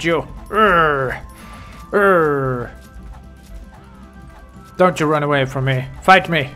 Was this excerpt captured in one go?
yes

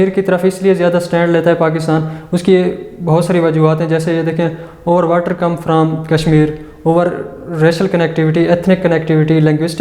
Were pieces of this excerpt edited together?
no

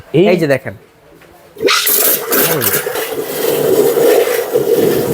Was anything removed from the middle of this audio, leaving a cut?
yes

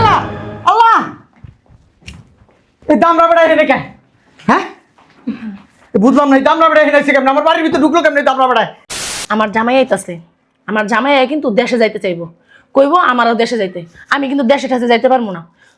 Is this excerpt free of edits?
no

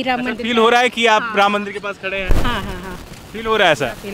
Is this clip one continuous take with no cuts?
yes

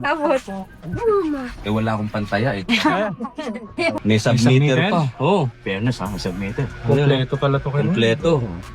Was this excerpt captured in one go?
no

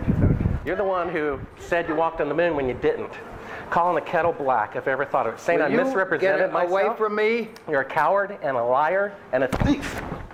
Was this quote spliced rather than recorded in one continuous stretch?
no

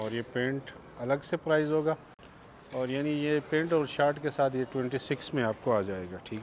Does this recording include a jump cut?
no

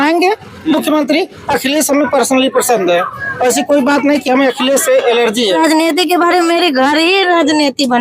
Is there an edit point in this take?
yes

